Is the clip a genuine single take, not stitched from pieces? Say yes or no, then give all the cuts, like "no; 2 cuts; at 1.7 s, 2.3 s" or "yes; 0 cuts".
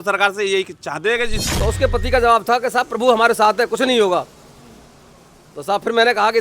no; 1 cut; at 1.4 s